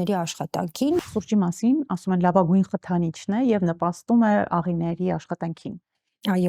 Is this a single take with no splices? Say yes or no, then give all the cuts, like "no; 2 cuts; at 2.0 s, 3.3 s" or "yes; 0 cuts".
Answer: no; 1 cut; at 1.0 s